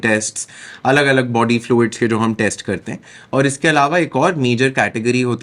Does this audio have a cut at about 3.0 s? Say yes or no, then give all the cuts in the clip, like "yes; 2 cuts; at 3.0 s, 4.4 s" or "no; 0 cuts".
no; 0 cuts